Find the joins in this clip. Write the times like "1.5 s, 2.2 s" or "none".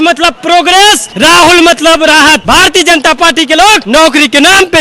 1.1 s, 2.4 s, 3.8 s